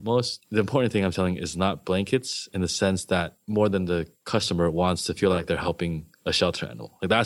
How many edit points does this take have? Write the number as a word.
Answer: one